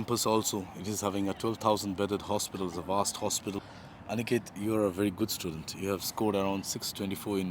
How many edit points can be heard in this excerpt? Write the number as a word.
one